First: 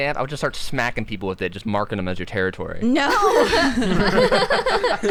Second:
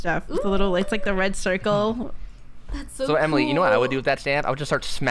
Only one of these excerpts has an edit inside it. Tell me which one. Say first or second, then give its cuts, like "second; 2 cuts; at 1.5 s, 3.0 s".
second; 1 cut; at 2.6 s